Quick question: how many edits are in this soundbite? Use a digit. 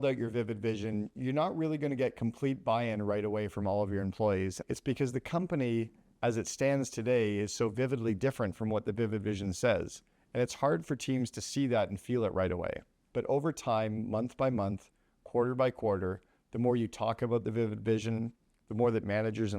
1